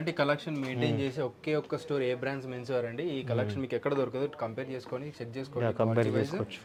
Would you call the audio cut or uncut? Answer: uncut